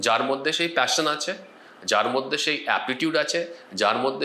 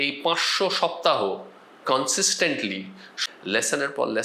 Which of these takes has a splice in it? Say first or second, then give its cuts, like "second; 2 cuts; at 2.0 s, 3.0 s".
second; 1 cut; at 3.1 s